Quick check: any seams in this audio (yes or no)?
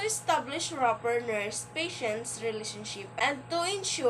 yes